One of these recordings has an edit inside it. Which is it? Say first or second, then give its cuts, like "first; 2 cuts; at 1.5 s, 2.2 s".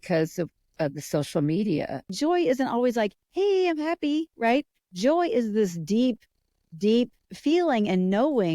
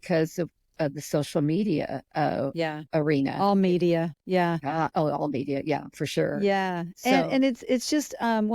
first; 2 cuts; at 2.1 s, 7.3 s